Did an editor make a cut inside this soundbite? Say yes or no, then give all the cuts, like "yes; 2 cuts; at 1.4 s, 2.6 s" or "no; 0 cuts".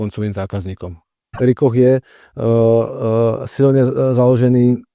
yes; 1 cut; at 1.4 s